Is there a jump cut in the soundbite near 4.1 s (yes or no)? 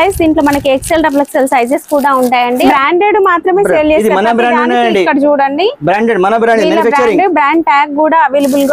no